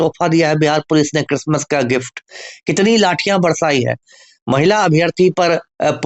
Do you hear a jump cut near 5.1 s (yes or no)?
no